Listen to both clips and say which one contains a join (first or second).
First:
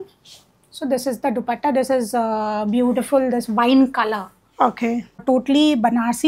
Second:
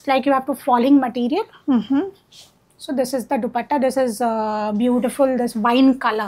first